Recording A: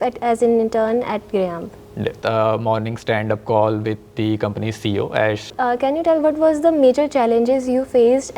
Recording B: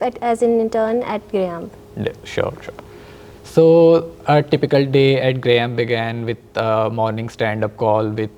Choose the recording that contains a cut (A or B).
A